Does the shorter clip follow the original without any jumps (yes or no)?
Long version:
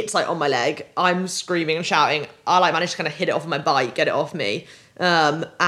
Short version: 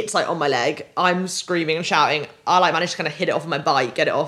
yes